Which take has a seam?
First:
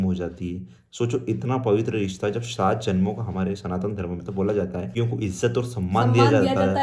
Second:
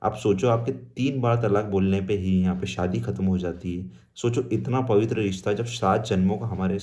first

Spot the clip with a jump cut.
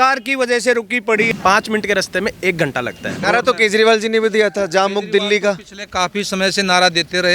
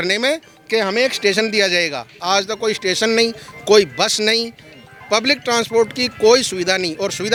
first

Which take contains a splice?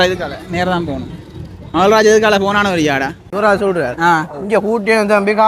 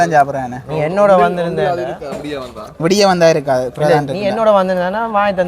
first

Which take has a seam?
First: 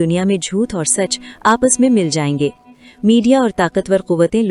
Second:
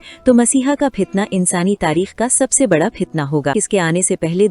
second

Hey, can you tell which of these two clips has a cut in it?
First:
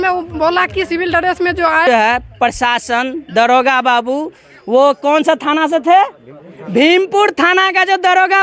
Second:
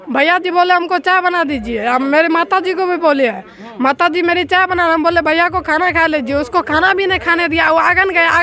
first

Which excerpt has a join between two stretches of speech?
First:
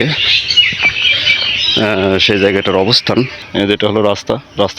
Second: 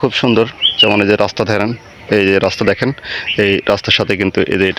first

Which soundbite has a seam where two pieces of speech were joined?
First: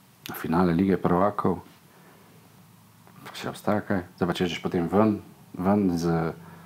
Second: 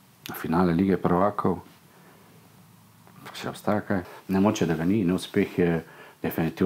second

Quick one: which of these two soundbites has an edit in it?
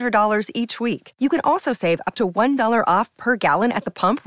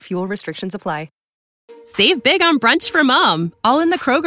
second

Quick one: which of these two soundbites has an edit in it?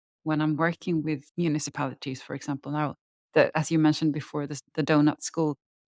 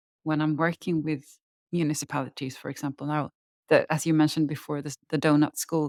first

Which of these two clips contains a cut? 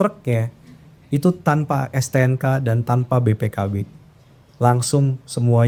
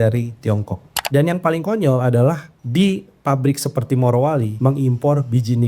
second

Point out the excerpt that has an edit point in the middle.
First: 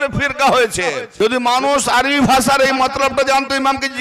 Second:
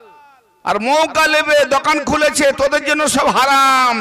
first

